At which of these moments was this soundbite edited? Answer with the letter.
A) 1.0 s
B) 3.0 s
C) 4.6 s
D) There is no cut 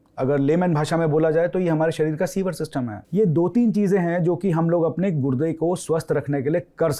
B